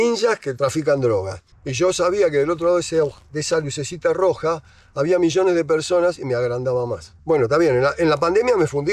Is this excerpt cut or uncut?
cut